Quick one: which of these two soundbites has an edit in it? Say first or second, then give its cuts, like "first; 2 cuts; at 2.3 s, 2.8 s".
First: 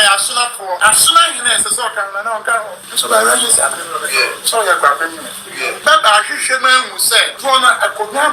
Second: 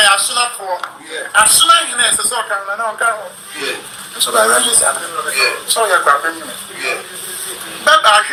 first; 4 cuts; at 0.8 s, 2.9 s, 5.8 s, 7.3 s